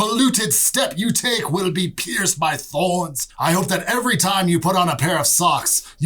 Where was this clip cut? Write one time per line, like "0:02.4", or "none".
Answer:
0:03.2